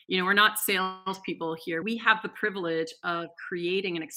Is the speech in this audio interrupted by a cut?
yes; 1 cut; at 1.8 s

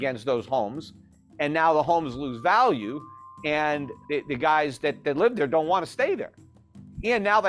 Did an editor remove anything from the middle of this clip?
yes; 1 cut; at 3.9 s

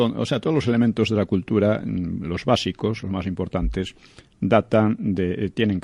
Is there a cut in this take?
yes; 1 cut; at 1.8 s

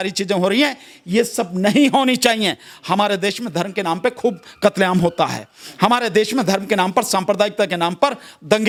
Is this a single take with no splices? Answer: yes; 0 cuts

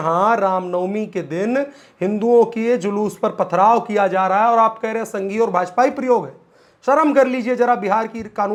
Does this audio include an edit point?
no; 0 cuts

